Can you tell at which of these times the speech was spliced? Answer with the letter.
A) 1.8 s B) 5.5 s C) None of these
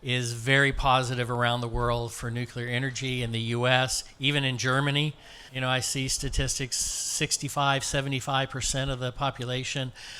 B